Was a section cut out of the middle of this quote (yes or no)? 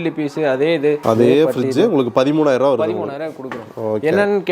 no